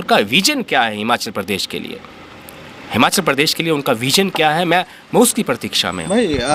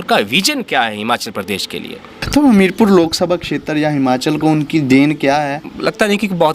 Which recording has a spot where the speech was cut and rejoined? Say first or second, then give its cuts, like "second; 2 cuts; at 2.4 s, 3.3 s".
second; 2 cuts; at 2.2 s, 5.6 s